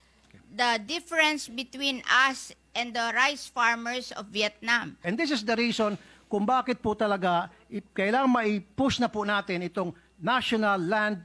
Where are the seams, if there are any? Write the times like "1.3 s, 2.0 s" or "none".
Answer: 5.0 s